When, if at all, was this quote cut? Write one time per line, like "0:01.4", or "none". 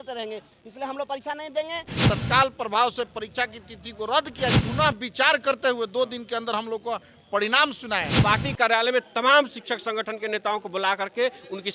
0:01.9
0:04.5
0:08.2